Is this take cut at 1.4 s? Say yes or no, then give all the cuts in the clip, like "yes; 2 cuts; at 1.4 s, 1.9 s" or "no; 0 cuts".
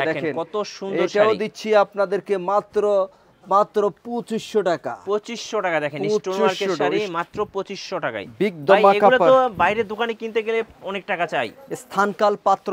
no; 0 cuts